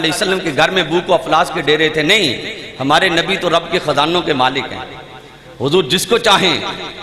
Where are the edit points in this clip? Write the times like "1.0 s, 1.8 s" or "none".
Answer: none